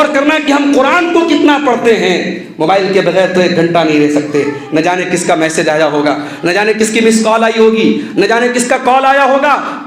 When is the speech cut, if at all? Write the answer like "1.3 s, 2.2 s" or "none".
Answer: none